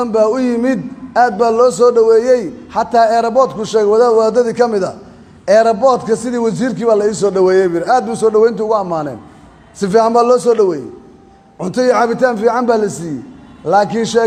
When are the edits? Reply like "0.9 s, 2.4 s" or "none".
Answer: none